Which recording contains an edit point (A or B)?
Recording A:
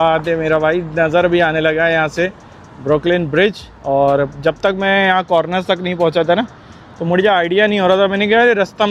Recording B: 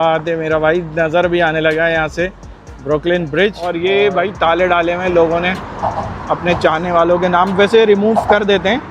B